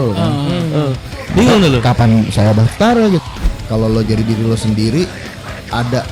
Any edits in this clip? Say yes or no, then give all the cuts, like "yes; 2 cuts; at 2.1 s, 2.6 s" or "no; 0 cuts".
yes; 2 cuts; at 1.1 s, 3.2 s